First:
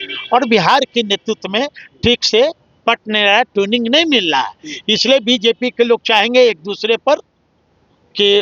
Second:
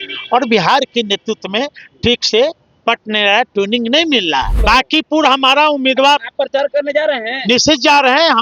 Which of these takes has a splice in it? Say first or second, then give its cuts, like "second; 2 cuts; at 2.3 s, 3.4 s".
second; 1 cut; at 4.5 s